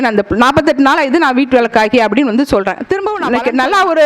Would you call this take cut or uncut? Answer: cut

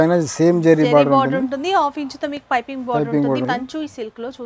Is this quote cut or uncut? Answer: cut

